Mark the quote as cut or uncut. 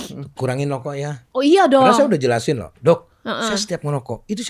cut